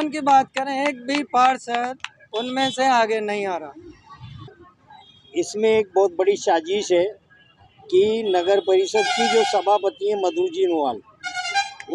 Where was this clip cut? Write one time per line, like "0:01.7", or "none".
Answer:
0:04.7